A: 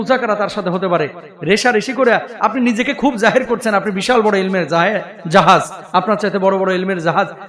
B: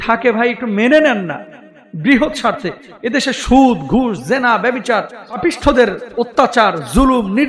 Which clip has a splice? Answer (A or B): B